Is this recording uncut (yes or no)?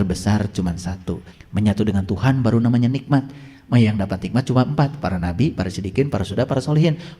no